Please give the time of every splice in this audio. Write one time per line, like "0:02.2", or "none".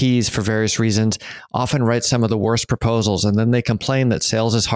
none